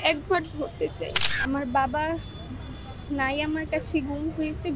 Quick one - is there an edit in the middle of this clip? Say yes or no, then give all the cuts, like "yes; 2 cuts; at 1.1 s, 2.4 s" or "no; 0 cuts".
yes; 1 cut; at 1.2 s